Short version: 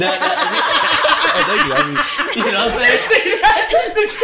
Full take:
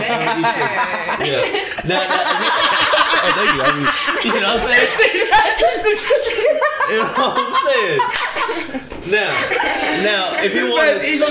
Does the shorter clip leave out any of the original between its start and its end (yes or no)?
no